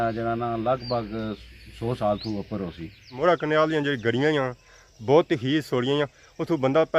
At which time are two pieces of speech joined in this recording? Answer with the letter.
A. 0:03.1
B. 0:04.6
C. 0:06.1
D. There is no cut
A